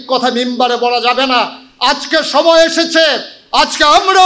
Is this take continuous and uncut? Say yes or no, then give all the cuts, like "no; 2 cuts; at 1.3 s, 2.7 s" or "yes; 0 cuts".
yes; 0 cuts